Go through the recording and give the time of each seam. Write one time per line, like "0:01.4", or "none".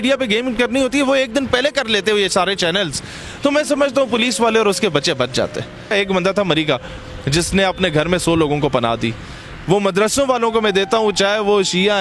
0:05.9